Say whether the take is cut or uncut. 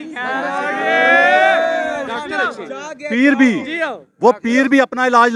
uncut